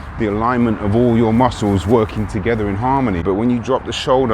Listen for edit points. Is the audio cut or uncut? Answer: cut